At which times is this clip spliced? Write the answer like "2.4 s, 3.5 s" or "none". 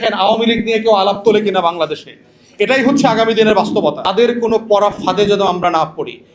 4.0 s